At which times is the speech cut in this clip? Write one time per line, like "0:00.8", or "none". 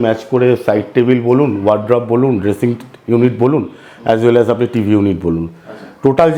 none